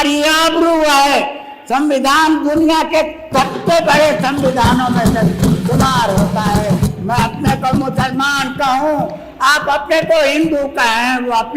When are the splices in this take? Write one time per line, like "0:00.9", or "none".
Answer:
0:06.8